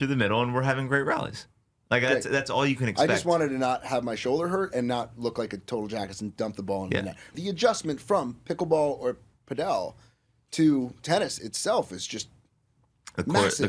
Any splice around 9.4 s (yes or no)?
no